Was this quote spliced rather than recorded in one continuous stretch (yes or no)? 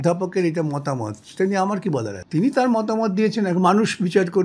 yes